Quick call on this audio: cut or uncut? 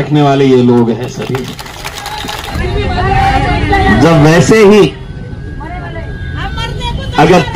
cut